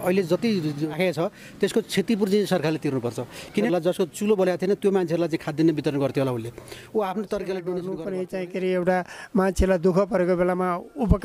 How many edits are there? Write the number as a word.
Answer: three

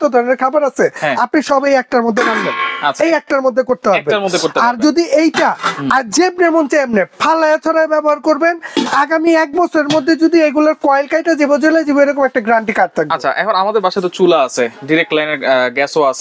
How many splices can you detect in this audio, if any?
zero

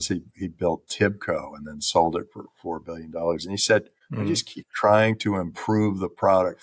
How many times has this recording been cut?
one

